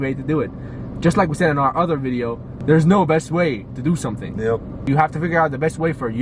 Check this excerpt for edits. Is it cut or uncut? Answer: cut